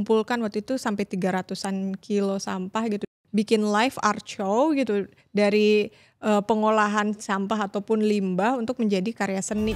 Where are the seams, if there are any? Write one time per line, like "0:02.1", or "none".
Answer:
0:03.1